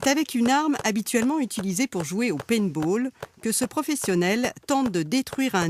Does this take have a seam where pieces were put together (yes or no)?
no